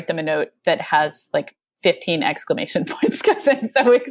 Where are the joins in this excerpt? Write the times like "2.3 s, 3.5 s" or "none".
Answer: none